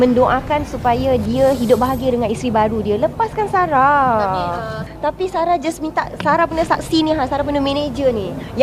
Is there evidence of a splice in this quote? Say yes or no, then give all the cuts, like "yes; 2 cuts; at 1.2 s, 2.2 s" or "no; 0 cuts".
no; 0 cuts